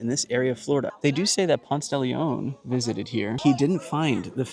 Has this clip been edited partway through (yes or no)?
yes